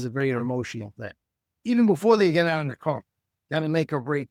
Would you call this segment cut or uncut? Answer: uncut